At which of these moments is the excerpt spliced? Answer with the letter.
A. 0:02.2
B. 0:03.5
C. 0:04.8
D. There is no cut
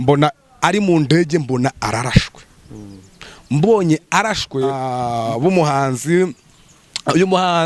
C